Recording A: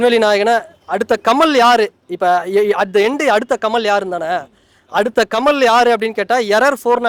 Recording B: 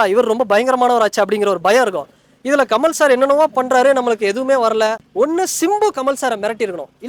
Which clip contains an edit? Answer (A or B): B